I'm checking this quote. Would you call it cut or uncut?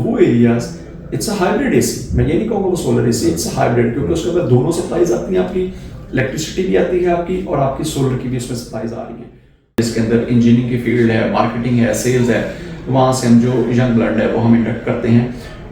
cut